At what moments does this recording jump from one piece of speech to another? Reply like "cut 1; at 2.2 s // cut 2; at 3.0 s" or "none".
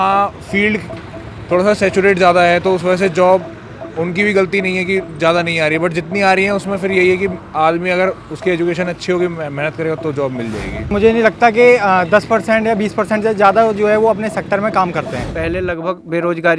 cut 1; at 10.7 s // cut 2; at 15.3 s